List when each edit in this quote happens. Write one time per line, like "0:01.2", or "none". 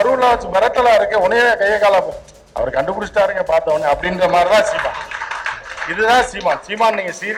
none